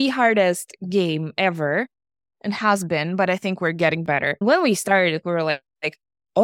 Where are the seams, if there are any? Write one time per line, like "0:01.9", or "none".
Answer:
0:04.4